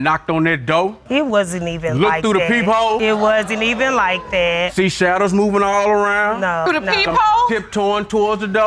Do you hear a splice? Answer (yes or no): no